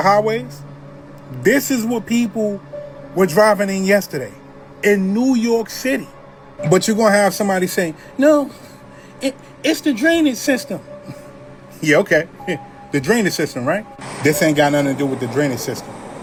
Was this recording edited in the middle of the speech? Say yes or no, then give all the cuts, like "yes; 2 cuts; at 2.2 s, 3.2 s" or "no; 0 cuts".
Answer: no; 0 cuts